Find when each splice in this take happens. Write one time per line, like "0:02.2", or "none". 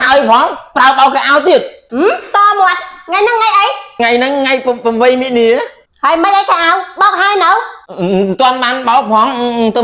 0:01.8
0:04.0
0:05.8